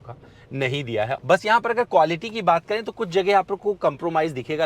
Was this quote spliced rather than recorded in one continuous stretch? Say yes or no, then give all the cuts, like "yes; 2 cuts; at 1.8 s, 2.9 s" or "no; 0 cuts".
yes; 1 cut; at 1.2 s